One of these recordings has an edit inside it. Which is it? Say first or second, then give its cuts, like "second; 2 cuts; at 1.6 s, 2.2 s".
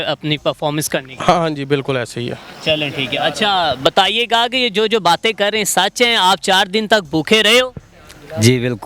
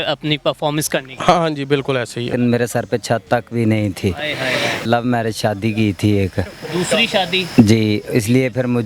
second; 2 cuts; at 2.3 s, 4.8 s